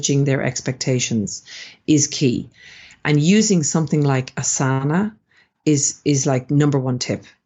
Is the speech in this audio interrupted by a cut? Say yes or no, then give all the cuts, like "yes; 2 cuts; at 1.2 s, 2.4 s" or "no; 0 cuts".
no; 0 cuts